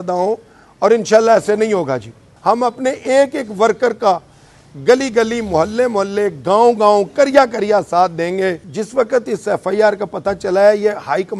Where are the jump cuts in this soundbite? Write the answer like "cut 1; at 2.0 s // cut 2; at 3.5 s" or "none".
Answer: cut 1; at 2.2 s // cut 2; at 8.7 s